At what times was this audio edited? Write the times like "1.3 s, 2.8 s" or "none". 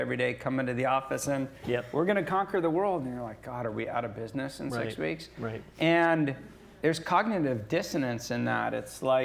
none